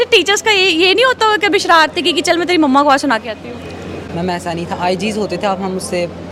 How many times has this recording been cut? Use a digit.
0